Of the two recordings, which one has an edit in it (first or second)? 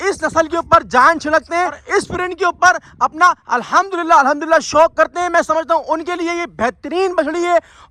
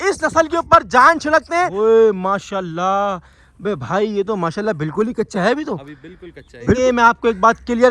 second